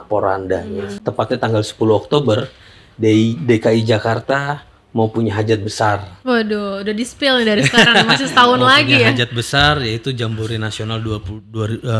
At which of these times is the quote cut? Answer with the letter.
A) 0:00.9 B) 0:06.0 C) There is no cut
A